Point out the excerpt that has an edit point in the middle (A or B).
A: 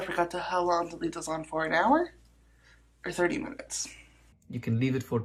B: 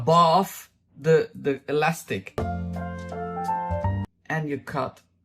B